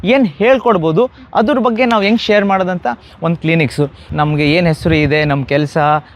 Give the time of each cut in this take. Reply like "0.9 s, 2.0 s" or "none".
4.1 s